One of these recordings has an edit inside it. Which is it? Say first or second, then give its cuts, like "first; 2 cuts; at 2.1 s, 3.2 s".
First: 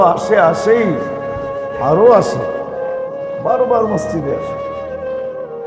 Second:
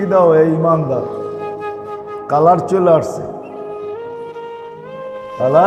first; 3 cuts; at 2.4 s, 3.4 s, 4.9 s